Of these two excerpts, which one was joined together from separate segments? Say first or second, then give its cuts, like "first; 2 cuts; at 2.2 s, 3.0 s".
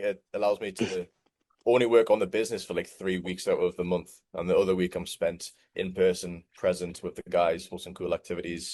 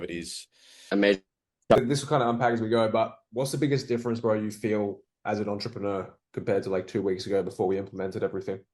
second; 1 cut; at 1.8 s